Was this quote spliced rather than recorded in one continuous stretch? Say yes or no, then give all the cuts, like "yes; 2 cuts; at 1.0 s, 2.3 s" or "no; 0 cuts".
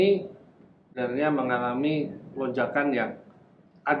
yes; 1 cut; at 0.9 s